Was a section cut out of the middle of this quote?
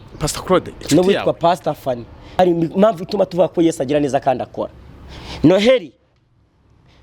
yes; 1 cut; at 2.2 s

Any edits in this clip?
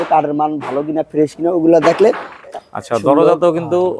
yes; 1 cut; at 2.5 s

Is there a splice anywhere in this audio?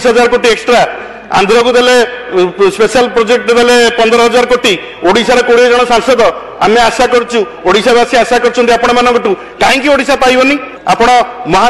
no; 0 cuts

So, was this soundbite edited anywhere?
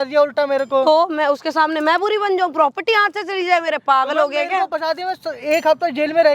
no; 0 cuts

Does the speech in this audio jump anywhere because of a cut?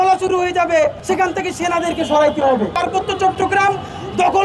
yes; 2 cuts; at 1.0 s, 2.7 s

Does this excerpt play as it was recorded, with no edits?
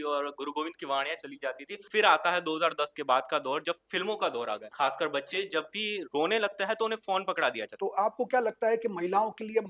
no; 3 cuts; at 1.8 s, 4.7 s, 7.7 s

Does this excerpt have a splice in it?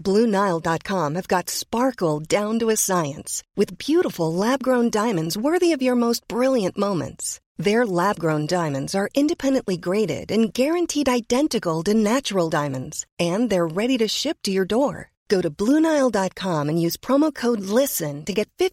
no; 0 cuts

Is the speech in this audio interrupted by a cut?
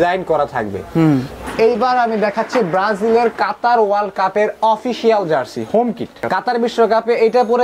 yes; 2 cuts; at 1.4 s, 6.2 s

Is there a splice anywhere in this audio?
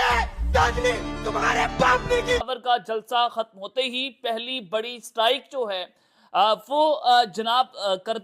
yes; 1 cut; at 2.5 s

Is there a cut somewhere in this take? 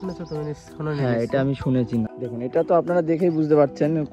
yes; 1 cut; at 2.2 s

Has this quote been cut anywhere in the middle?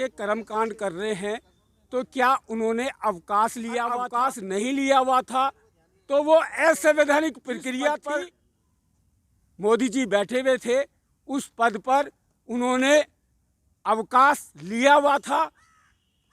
yes; 2 cuts; at 4.1 s, 8.0 s

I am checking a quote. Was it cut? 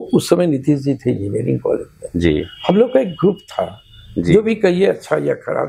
no; 0 cuts

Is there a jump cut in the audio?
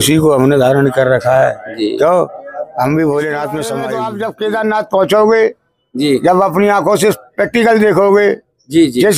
yes; 1 cut; at 3.9 s

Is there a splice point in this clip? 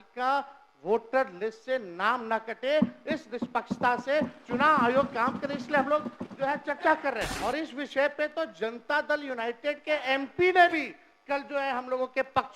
yes; 1 cut; at 7.3 s

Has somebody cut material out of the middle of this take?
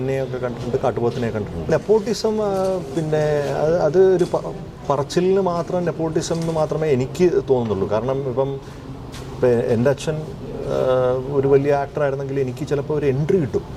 yes; 1 cut; at 1.7 s

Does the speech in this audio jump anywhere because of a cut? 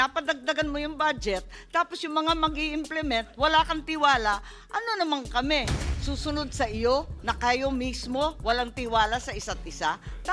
no; 0 cuts

